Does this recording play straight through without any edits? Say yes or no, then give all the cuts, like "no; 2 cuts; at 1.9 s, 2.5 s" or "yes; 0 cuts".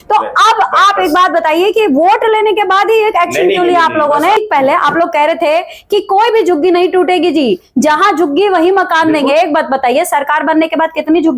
no; 1 cut; at 4.4 s